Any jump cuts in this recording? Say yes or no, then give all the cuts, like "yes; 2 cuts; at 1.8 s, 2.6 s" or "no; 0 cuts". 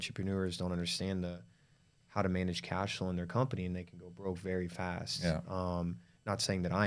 no; 0 cuts